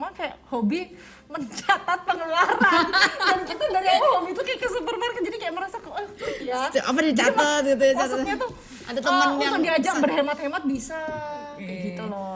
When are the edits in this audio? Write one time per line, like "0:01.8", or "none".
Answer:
none